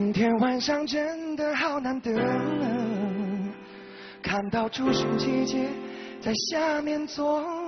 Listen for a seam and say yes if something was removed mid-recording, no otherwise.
no